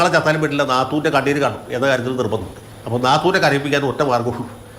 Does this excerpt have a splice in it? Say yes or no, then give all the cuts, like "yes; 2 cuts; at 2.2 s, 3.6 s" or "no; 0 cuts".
yes; 1 cut; at 2.7 s